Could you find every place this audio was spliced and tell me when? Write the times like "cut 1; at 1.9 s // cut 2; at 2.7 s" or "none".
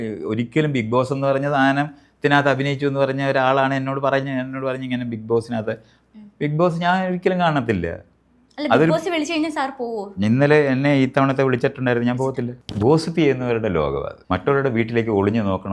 cut 1; at 12.6 s // cut 2; at 14.1 s